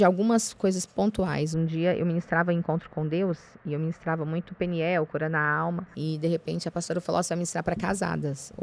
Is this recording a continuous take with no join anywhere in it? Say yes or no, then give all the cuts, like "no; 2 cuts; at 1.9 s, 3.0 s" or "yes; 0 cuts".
no; 1 cut; at 5.9 s